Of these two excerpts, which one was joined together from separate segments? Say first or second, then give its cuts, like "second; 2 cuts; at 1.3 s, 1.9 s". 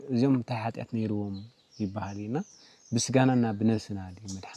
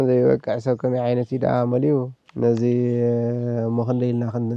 second; 1 cut; at 2.2 s